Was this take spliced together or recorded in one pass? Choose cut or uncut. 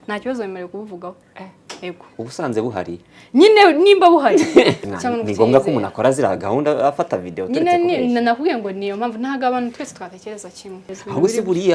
cut